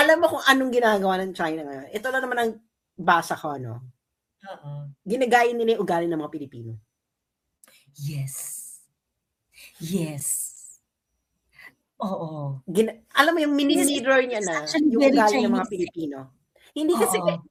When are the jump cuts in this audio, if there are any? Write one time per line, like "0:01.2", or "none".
none